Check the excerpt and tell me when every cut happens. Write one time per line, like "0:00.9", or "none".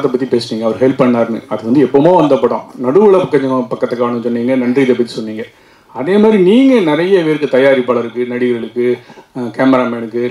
none